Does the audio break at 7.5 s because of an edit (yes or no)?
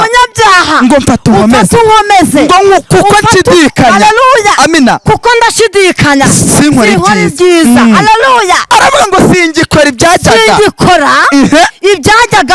no